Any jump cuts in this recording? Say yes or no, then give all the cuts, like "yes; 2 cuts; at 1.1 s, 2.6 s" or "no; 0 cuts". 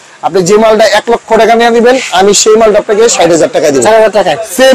no; 0 cuts